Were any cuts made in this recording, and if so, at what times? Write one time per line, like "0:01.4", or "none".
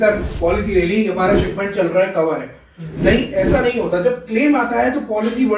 none